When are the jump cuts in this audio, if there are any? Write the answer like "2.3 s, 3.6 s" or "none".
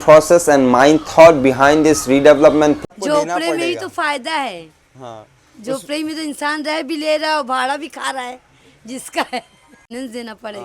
2.8 s